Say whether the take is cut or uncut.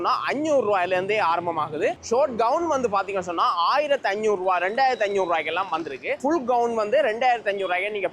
cut